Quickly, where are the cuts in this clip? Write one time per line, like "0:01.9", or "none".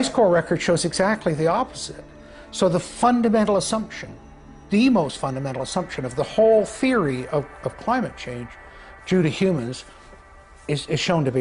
none

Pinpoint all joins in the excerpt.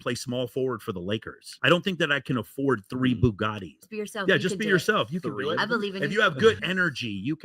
0:03.8
0:06.6

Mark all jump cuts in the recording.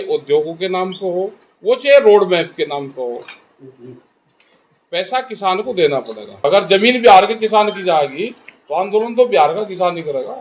0:06.4

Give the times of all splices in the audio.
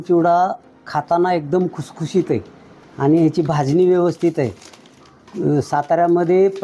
none

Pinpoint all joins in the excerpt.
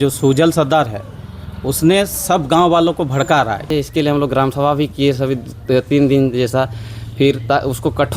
0:03.7

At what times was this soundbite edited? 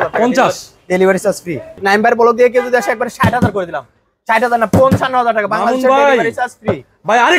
0:01.8

